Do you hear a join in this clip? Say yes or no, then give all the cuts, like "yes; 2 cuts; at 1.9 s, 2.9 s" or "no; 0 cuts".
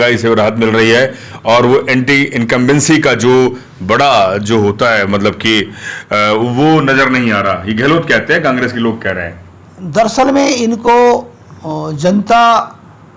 no; 0 cuts